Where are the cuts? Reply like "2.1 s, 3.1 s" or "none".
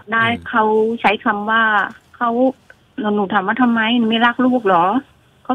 none